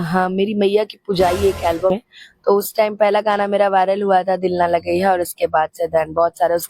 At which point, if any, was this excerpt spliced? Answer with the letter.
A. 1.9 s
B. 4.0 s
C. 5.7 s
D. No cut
A